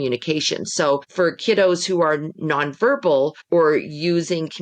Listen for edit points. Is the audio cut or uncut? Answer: cut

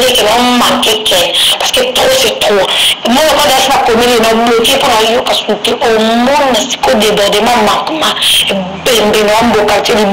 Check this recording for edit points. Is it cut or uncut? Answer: uncut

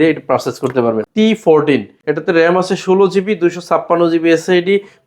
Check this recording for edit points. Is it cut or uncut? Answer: cut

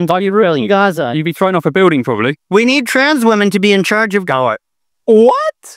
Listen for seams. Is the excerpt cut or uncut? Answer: cut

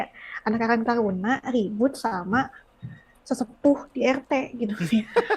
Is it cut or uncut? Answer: uncut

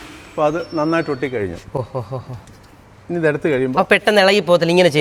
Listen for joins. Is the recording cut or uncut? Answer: uncut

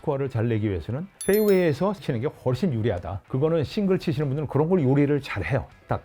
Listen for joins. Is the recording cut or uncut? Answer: cut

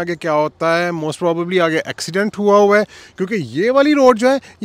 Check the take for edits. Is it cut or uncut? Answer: uncut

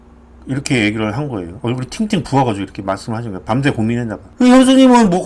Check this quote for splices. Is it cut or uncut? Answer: cut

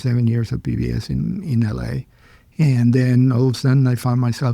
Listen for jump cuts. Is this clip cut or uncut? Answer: uncut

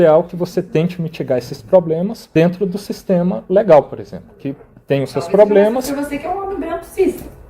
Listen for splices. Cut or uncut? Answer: cut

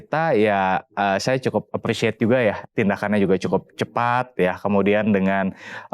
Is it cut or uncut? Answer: cut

